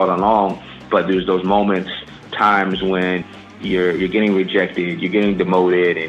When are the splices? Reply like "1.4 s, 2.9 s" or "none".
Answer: 0.8 s, 2.3 s, 3.5 s